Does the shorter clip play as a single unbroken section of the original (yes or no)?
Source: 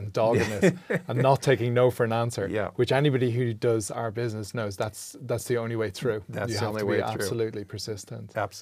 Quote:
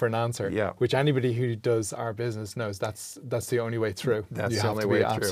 yes